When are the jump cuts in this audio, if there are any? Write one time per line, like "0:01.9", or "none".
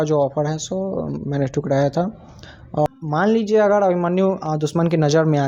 0:02.9